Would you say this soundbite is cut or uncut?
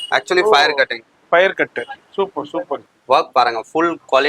cut